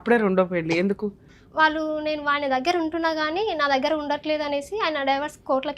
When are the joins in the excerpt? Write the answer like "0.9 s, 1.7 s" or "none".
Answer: 1.3 s